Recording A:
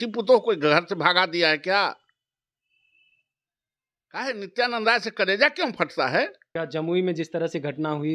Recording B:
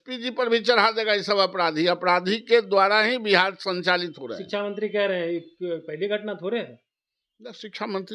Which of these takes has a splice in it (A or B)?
A